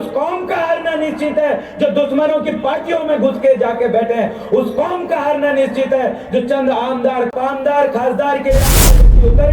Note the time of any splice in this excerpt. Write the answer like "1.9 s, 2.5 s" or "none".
7.3 s